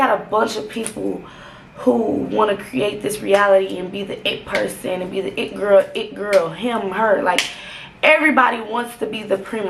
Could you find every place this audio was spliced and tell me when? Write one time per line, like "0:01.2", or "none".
none